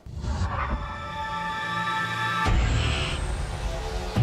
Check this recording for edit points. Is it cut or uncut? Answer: uncut